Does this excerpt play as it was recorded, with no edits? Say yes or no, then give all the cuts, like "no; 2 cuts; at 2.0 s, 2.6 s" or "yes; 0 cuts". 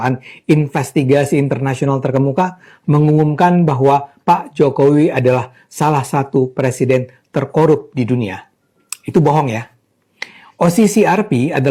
yes; 0 cuts